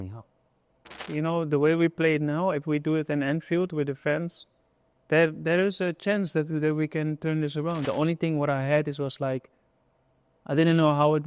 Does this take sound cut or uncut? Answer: cut